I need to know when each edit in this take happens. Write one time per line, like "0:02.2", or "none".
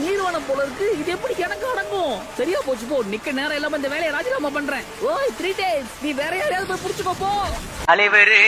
none

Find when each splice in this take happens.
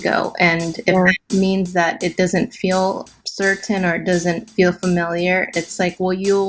none

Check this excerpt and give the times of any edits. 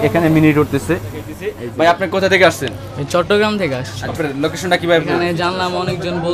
0:01.4
0:04.1

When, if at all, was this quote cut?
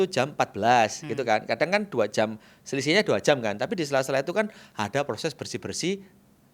none

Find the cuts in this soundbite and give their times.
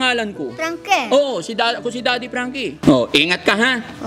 0:02.8

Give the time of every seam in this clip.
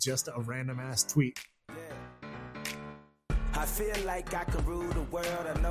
0:01.4

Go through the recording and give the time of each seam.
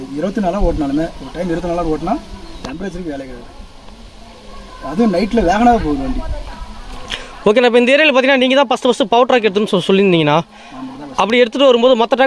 none

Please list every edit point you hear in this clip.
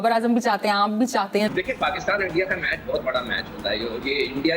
0:01.5

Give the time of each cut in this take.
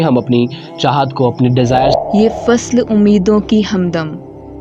0:01.9

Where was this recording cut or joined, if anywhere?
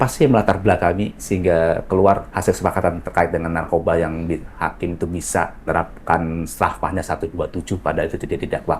0:01.1
0:02.3
0:05.6

